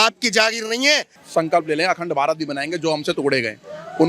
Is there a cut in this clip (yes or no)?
yes